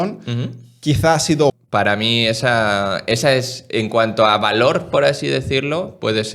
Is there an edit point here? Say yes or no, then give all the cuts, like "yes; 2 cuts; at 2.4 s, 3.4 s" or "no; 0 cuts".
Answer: yes; 1 cut; at 1.5 s